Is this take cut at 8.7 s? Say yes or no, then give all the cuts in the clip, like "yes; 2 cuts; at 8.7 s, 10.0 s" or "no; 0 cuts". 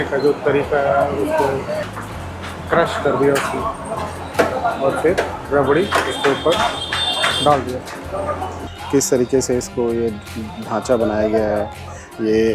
yes; 2 cuts; at 1.9 s, 8.7 s